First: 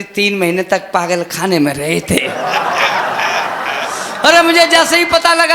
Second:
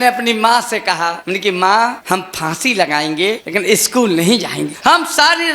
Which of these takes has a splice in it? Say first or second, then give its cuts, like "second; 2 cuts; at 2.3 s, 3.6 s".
second; 4 cuts; at 1.2 s, 2.0 s, 3.4 s, 4.7 s